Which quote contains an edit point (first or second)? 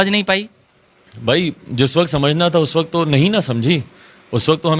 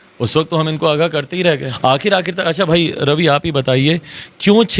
second